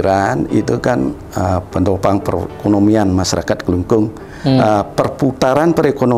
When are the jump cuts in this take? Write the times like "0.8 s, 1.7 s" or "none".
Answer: none